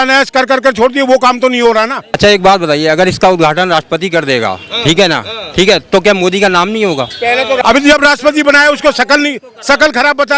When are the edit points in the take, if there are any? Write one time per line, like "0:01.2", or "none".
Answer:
0:02.1
0:07.6